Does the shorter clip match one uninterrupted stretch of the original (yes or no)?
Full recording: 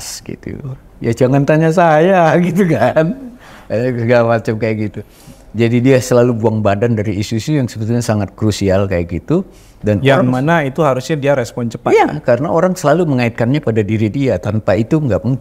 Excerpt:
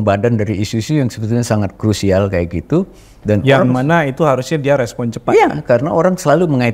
yes